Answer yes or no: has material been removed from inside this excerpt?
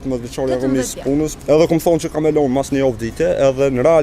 yes